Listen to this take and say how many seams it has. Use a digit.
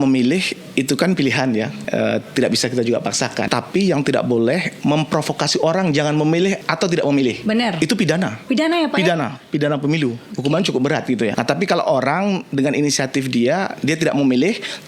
5